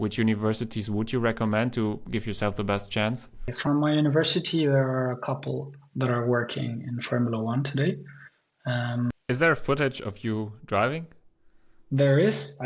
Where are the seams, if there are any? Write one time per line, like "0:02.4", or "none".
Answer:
0:03.5
0:09.1